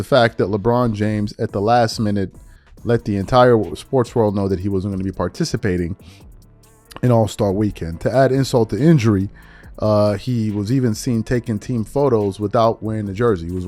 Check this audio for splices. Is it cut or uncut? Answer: uncut